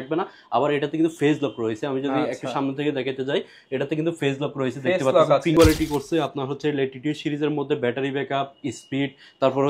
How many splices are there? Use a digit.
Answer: 1